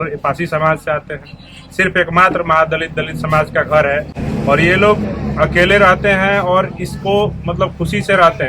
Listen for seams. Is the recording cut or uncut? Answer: uncut